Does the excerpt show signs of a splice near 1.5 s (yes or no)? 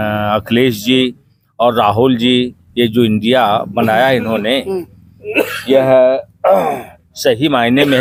no